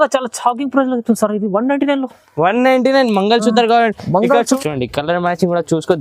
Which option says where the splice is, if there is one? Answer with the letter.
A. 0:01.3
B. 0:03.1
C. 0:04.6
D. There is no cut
C